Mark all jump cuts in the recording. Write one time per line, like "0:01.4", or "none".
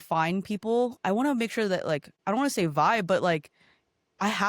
0:02.1